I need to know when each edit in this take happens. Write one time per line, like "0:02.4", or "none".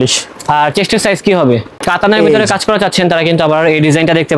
0:02.1

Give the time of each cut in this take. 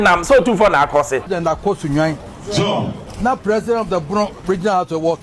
0:01.3
0:03.0

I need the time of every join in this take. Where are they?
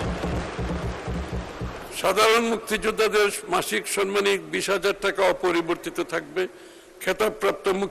0:01.9

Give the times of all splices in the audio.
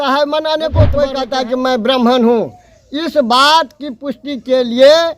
0:01.1

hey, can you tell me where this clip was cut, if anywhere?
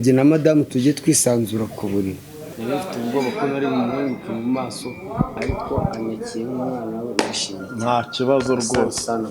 0:02.4

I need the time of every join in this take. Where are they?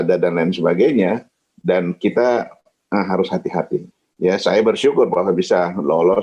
0:04.0

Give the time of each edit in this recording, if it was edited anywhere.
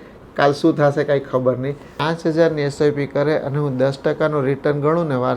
0:02.0

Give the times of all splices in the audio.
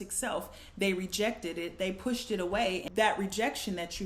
0:02.8

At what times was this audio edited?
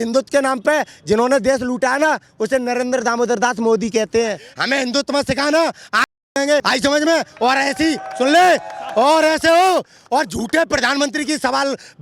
0:04.5
0:06.6

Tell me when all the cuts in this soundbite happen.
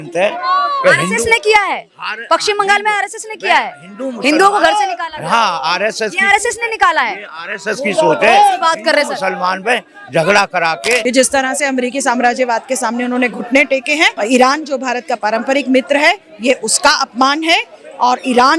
0:11.0
0:14.2

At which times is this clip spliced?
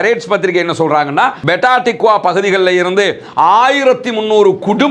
0:01.4

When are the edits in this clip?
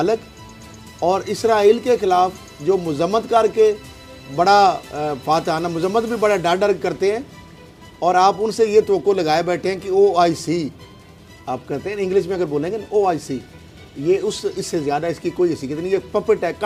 none

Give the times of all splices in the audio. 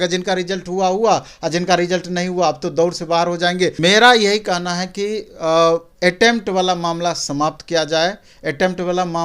0:03.8

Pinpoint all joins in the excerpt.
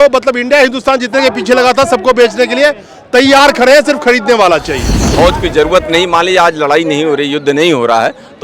0:05.0

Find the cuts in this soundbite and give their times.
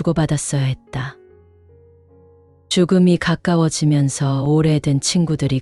0:01.1
0:02.6

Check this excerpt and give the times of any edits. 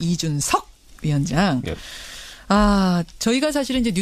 none

